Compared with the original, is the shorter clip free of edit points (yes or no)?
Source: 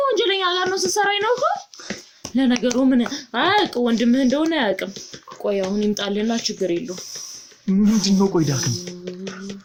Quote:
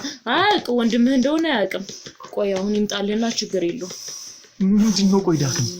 yes